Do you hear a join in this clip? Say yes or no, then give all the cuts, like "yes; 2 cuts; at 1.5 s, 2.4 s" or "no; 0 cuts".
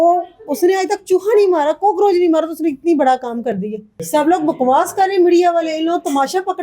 yes; 1 cut; at 3.9 s